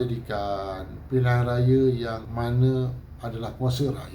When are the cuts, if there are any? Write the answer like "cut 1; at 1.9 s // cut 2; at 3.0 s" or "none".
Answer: cut 1; at 2.2 s

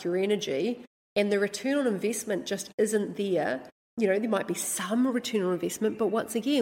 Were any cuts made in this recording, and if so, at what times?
cut 1; at 3.8 s

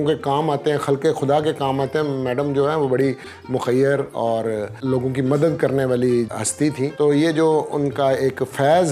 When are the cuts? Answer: cut 1; at 4.8 s // cut 2; at 6.4 s

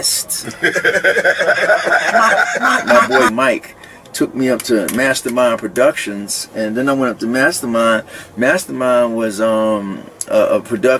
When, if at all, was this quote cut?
cut 1; at 2.8 s

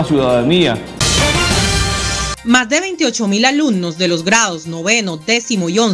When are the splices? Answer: cut 1; at 0.9 s // cut 2; at 2.3 s

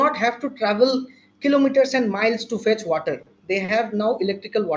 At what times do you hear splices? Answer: none

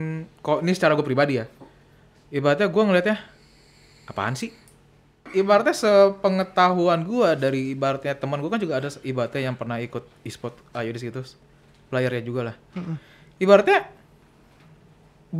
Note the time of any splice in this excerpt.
cut 1; at 5.3 s

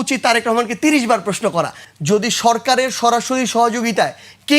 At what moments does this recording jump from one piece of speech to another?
cut 1; at 1.8 s

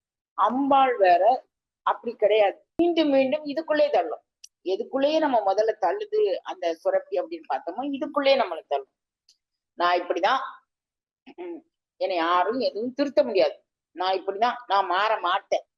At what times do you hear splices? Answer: cut 1; at 2.6 s

